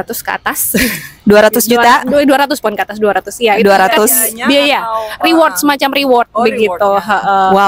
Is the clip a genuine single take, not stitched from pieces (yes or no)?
yes